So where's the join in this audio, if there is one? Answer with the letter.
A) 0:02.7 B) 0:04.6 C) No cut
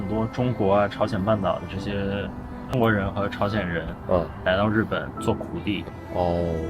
A